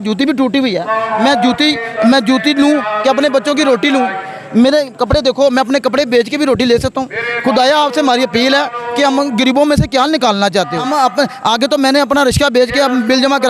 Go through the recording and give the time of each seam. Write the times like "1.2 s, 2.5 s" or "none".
10.8 s